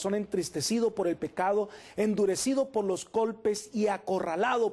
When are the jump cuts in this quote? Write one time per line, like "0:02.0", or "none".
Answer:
none

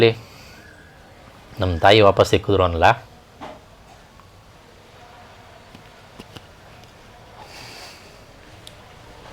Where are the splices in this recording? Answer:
none

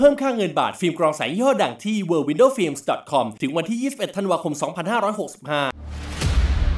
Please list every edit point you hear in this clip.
0:05.8

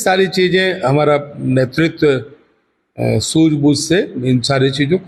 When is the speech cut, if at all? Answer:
none

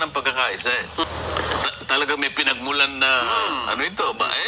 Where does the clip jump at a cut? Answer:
0:01.0

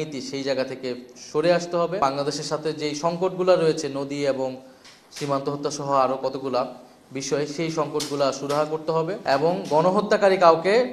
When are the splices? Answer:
0:02.0
0:09.2

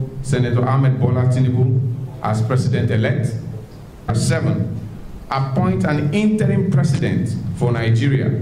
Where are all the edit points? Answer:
0:04.1

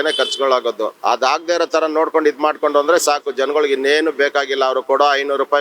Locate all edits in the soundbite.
0:01.0

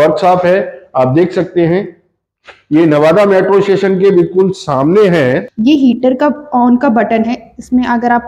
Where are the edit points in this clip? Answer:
0:05.5

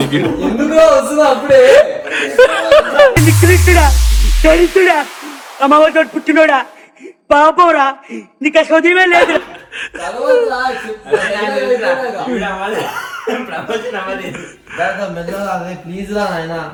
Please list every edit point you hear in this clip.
none

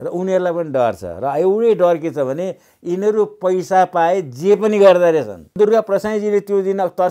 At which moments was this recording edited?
0:05.5

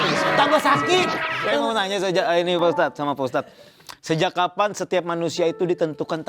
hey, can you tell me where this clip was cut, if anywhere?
0:01.3

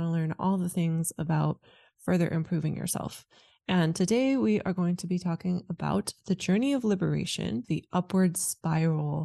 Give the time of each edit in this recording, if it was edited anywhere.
0:07.6

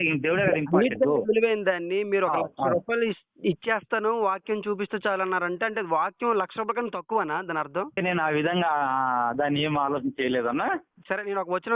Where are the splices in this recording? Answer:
0:08.0

